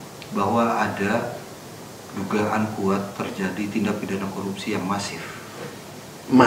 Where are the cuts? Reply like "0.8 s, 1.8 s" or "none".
none